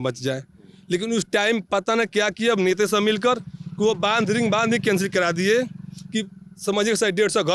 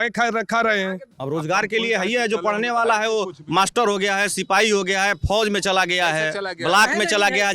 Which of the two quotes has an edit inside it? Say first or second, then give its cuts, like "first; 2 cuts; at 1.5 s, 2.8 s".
second; 1 cut; at 1.1 s